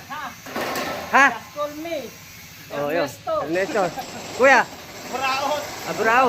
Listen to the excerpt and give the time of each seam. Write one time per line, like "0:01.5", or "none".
none